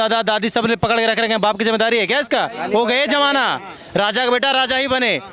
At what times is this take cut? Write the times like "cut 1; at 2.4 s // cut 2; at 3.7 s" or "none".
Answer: none